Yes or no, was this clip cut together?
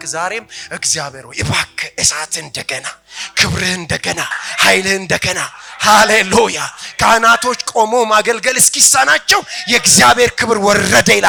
no